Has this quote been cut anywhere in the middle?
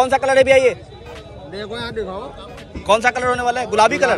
no; 0 cuts

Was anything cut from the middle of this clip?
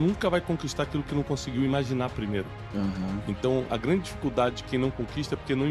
no; 0 cuts

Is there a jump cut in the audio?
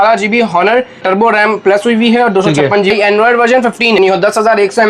yes; 3 cuts; at 1.0 s, 2.9 s, 4.0 s

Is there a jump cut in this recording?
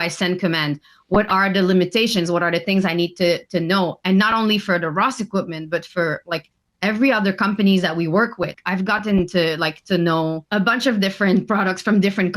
yes; 2 cuts; at 8.6 s, 10.4 s

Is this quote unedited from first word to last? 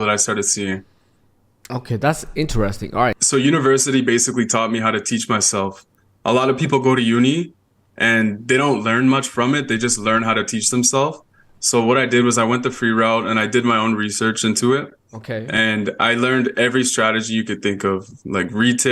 no; 1 cut; at 3.2 s

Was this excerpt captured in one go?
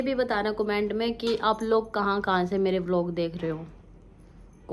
yes; 0 cuts

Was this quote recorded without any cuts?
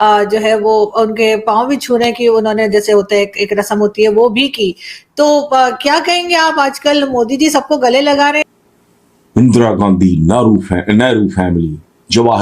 no; 1 cut; at 8.5 s

